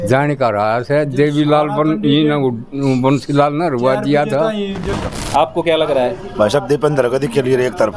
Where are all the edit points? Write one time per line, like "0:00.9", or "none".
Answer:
0:04.9